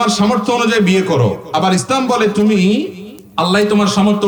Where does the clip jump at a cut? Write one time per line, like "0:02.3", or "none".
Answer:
none